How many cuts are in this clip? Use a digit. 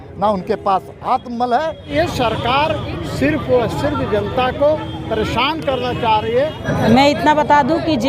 2